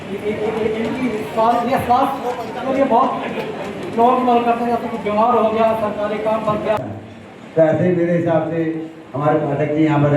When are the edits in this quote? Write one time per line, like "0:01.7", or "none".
0:06.8